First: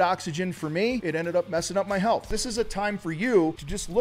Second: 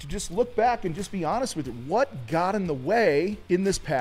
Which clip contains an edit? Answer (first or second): first